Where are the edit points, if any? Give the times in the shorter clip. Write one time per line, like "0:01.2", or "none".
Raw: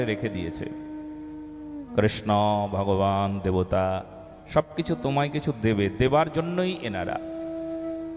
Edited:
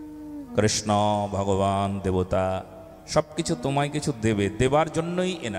none